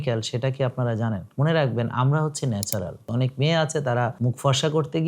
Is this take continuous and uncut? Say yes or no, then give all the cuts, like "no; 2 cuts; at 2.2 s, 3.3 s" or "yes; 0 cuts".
no; 3 cuts; at 1.3 s, 3.0 s, 4.2 s